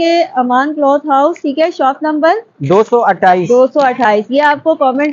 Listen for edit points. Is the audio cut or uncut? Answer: uncut